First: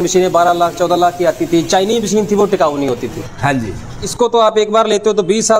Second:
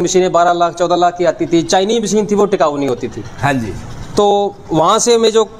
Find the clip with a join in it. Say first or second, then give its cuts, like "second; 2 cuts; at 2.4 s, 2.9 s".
first; 1 cut; at 4.0 s